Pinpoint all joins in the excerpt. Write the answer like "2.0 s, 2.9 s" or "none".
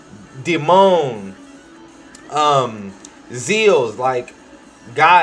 none